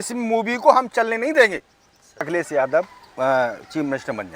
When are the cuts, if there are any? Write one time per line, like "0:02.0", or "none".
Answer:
0:02.3